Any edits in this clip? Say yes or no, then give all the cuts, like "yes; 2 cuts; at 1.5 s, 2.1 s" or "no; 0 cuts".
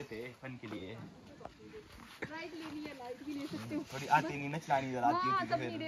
no; 0 cuts